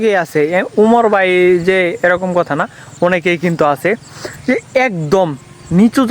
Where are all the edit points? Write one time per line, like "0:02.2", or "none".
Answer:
none